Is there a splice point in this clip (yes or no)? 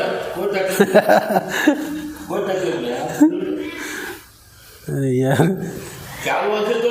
no